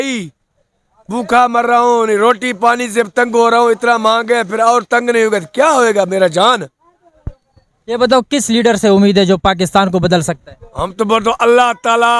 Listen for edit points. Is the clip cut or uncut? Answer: uncut